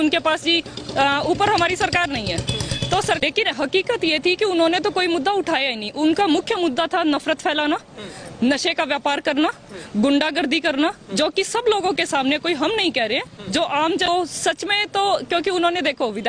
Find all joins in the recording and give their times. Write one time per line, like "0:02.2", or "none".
0:03.2
0:14.1